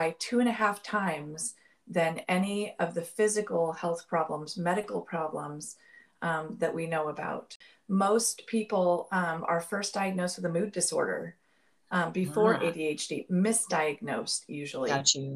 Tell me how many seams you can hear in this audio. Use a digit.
1